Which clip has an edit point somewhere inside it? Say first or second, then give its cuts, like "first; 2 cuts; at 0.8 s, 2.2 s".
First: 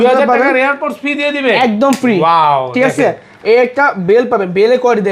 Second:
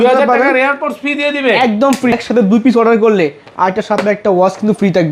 second; 1 cut; at 2.1 s